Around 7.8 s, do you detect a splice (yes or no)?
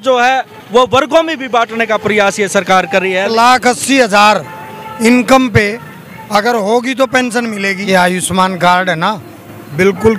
yes